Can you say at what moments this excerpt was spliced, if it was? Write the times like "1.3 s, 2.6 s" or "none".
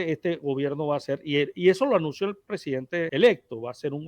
3.1 s